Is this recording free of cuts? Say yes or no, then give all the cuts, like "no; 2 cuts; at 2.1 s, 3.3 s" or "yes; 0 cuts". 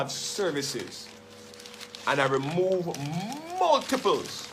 yes; 0 cuts